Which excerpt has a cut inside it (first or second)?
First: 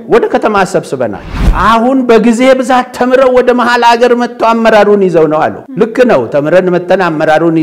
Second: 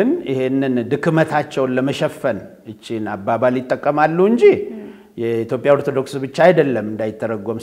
first